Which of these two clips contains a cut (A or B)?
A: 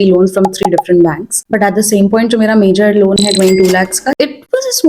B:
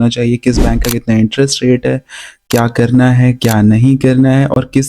A